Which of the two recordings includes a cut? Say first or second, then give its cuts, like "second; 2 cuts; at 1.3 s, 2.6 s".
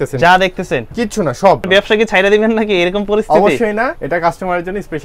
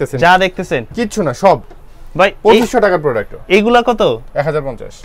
first; 2 cuts; at 1.6 s, 4.0 s